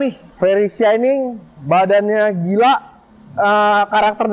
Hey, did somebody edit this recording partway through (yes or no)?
no